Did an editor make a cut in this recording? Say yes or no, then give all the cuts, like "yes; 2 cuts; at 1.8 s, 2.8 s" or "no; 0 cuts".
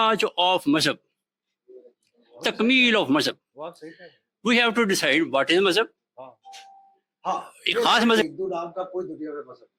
yes; 1 cut; at 8.1 s